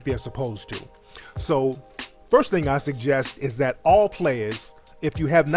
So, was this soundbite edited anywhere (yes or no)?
no